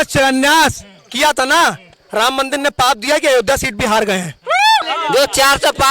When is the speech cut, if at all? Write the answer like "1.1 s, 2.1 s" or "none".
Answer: 4.7 s